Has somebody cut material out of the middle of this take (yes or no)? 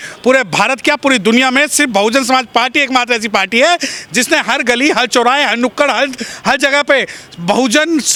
no